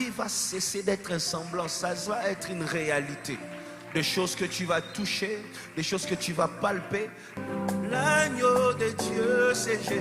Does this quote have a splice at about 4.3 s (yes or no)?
no